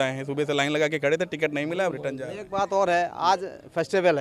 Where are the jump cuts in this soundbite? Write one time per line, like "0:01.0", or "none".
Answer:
none